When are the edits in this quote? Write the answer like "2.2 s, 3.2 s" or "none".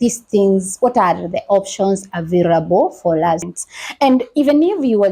3.4 s